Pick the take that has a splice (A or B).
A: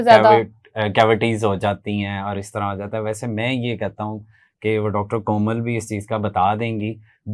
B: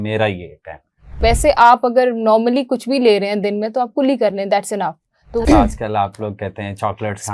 B